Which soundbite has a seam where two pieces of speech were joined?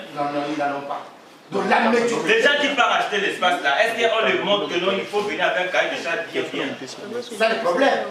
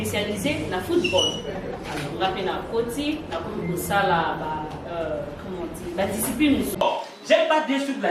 second; 1 cut; at 6.7 s

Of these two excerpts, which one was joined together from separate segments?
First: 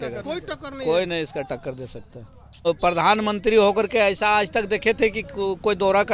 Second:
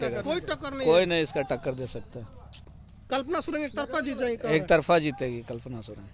first; 1 cut; at 2.7 s

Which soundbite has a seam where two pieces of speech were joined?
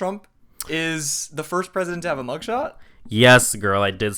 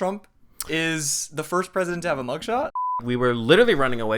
second; 1 cut; at 3.0 s

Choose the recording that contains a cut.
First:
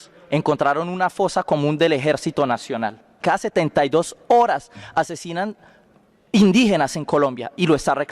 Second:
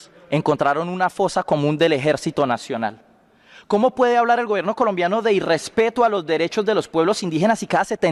first; 1 cut; at 3.2 s

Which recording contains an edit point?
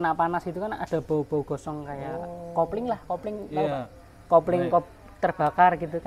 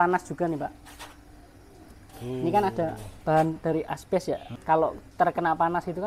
second; 1 cut; at 4.5 s

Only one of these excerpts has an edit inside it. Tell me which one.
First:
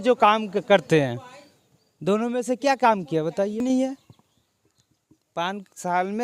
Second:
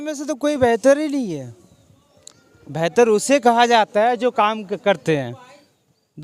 first; 1 cut; at 3.6 s

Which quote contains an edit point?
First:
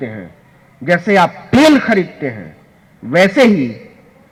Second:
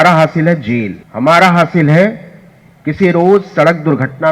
second; 1 cut; at 1.0 s

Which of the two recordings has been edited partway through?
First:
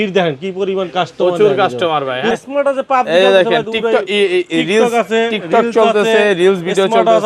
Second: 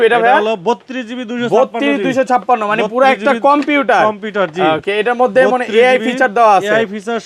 first; 1 cut; at 2.4 s

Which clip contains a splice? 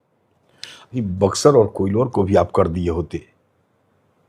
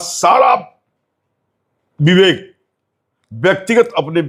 first; 1 cut; at 1.0 s

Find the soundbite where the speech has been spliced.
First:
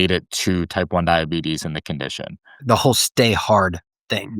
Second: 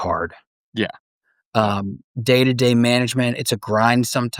first; 1 cut; at 2.5 s

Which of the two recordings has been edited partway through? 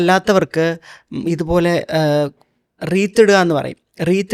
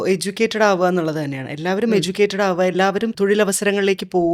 second; 1 cut; at 3.1 s

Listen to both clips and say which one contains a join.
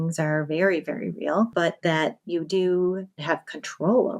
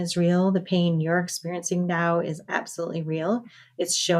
first; 2 cuts; at 1.5 s, 3.2 s

